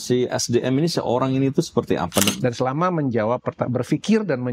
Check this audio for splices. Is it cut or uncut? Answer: cut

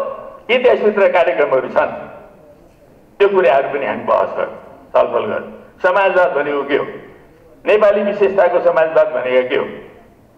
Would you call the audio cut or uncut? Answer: uncut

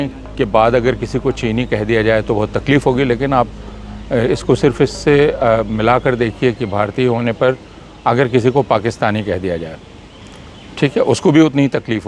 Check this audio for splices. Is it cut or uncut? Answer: uncut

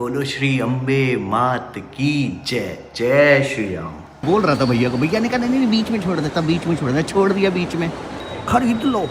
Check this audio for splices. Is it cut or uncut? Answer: cut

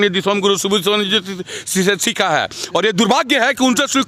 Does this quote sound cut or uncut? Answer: uncut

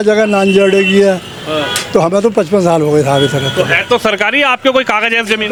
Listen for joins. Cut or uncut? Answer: uncut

